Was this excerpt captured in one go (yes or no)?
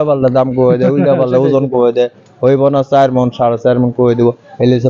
yes